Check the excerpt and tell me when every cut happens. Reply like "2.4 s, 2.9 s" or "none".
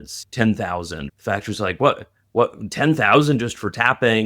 1.0 s